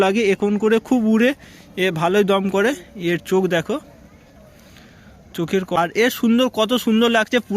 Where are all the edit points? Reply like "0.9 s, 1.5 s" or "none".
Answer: 5.8 s